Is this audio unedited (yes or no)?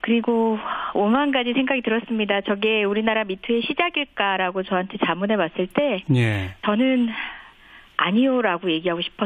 no